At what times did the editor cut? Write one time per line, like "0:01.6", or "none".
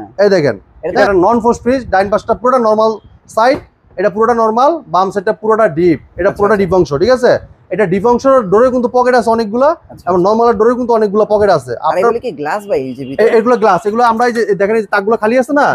0:01.0